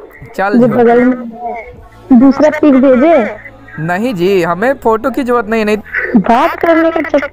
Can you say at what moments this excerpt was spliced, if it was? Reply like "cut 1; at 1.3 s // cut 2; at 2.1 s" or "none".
cut 1; at 5.8 s